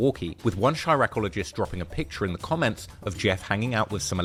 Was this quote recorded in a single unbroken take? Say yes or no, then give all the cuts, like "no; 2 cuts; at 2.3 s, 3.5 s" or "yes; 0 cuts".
yes; 0 cuts